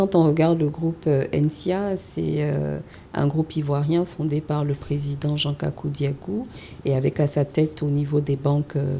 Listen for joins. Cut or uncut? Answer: uncut